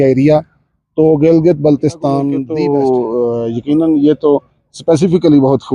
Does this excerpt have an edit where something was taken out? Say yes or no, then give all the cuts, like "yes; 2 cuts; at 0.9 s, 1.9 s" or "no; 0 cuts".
yes; 1 cut; at 2.4 s